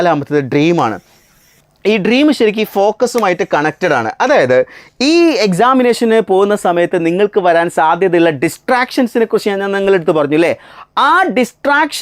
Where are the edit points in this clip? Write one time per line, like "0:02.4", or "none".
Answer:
none